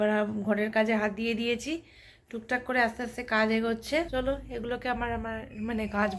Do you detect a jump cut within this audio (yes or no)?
yes